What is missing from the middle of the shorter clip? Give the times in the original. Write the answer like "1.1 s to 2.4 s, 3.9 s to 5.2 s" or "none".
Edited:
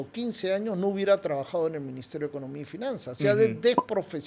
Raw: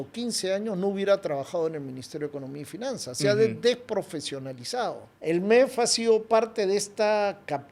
none